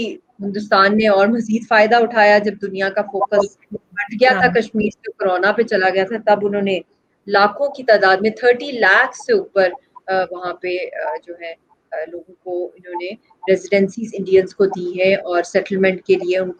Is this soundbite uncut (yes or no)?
yes